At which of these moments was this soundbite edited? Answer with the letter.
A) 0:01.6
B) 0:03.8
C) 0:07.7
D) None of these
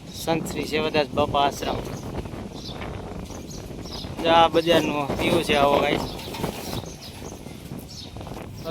D